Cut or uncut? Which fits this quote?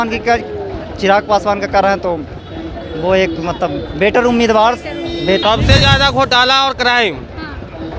cut